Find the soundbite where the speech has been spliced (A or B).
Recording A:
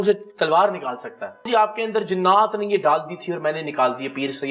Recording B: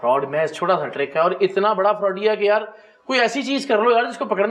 A